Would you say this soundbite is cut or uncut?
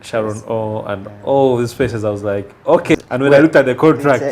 cut